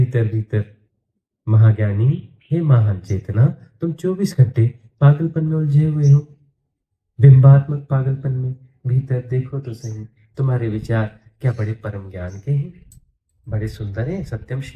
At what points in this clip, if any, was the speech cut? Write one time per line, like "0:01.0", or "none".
none

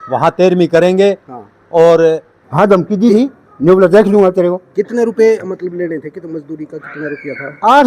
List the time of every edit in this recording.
0:02.4

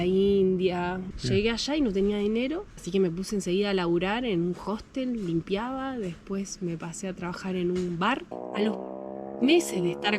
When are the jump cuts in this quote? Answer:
0:01.1
0:08.3

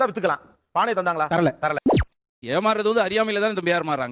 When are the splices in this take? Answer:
0:02.1

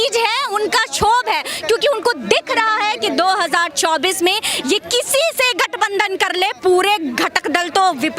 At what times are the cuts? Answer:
none

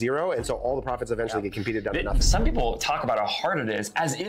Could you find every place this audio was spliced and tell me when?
0:02.2

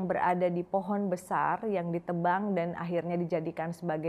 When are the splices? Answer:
none

